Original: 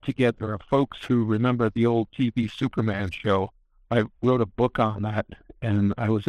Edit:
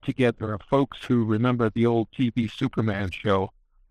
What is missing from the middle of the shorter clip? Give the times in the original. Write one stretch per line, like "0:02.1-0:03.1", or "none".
none